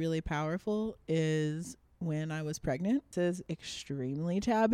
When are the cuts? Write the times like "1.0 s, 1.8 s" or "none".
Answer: 3.4 s